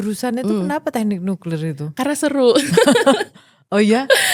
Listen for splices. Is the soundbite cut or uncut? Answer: uncut